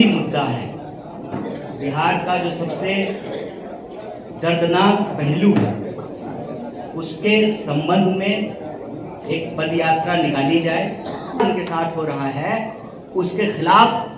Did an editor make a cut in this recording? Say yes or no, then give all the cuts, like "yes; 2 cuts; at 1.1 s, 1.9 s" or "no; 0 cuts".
yes; 1 cut; at 11.4 s